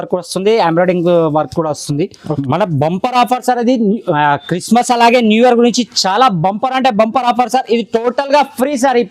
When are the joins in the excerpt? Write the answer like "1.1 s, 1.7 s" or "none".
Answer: 2.3 s